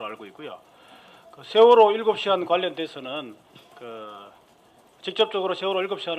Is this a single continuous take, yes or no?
no